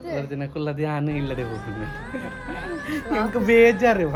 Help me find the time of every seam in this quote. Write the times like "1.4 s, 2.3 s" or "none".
none